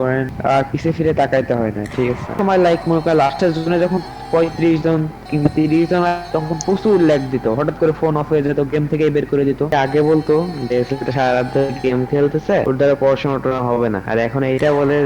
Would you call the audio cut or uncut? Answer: cut